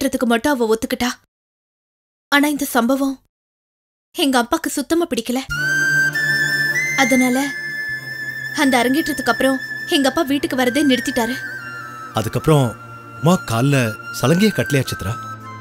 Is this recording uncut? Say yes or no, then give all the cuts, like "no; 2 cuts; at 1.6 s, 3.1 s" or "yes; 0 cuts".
yes; 0 cuts